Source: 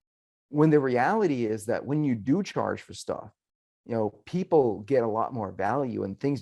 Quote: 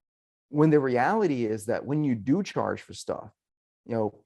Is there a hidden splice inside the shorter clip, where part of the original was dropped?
no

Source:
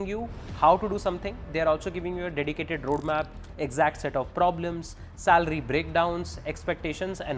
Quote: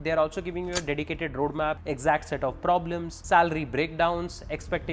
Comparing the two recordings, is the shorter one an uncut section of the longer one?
no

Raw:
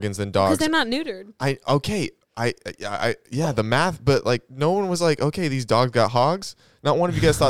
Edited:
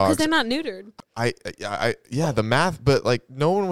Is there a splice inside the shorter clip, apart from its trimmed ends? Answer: yes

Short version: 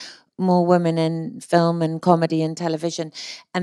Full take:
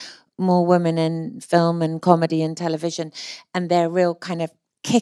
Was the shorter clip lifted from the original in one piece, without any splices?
yes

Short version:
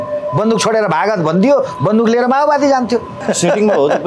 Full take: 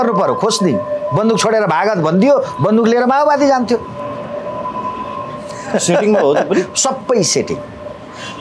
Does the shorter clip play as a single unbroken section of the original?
no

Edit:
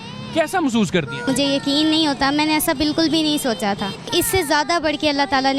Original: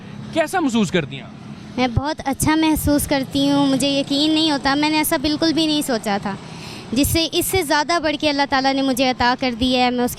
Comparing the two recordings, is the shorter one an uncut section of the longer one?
no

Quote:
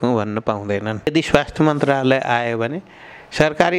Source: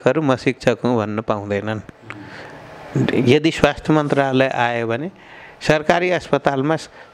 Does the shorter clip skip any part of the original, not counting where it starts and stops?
yes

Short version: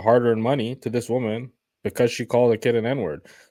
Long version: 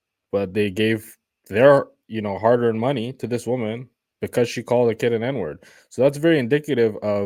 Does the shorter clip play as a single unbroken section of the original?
yes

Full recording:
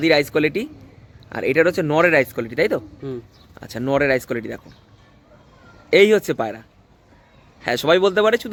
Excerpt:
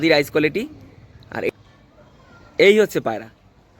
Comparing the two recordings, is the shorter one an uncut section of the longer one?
no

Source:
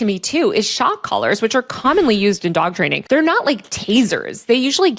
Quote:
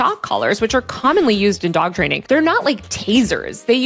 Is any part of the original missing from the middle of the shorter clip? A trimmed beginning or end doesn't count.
no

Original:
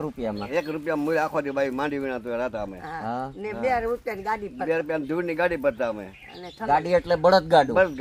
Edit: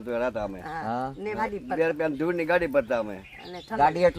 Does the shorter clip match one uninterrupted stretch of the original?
no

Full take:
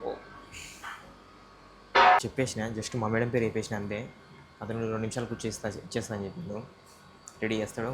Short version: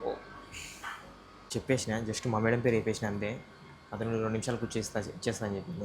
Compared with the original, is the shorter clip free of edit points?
no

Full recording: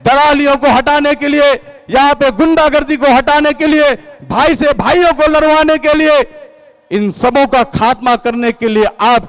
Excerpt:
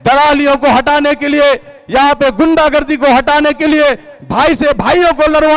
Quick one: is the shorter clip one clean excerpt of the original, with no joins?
yes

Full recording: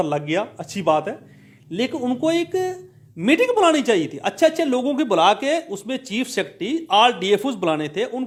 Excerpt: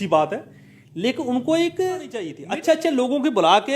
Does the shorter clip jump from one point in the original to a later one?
yes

